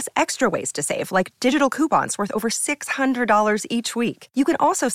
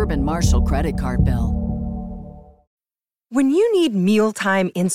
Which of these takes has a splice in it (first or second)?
second